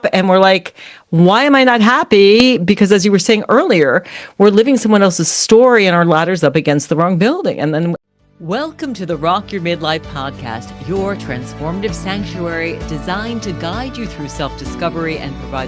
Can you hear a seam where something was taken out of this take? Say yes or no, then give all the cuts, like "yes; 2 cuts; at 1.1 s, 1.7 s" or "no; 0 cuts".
yes; 1 cut; at 8.0 s